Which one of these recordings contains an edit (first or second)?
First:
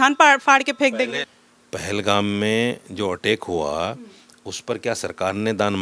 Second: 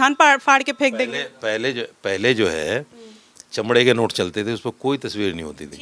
first